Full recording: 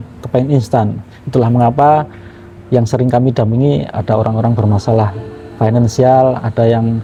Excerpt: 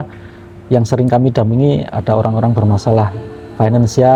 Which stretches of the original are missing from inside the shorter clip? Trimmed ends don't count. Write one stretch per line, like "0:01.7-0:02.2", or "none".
none